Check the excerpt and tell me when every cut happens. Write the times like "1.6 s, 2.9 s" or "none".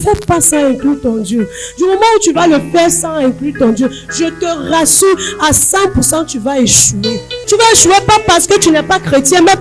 none